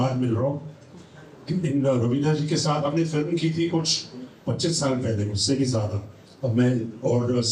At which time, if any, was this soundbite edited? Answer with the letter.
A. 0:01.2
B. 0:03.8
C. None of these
C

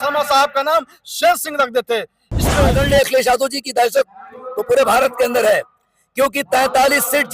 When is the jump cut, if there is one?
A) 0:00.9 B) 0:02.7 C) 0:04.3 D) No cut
B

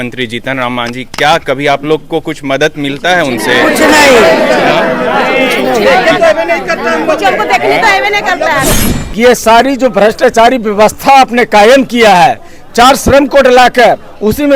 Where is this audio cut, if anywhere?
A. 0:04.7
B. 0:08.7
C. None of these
B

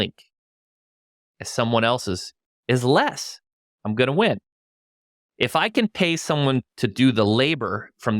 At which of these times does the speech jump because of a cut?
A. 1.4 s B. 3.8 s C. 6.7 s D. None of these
C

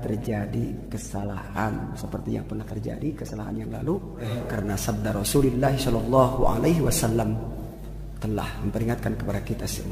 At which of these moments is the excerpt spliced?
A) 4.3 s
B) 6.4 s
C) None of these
A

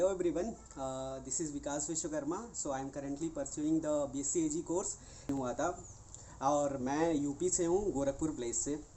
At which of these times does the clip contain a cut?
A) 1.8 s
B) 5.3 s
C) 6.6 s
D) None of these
B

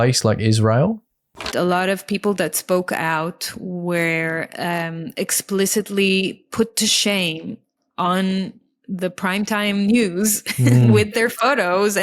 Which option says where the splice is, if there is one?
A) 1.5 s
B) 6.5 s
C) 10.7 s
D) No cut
A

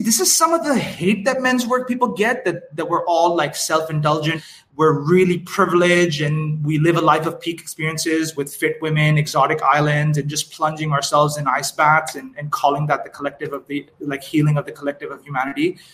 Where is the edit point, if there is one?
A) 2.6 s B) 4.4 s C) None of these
B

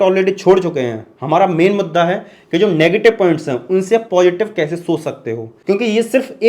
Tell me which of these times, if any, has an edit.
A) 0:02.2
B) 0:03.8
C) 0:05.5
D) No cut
C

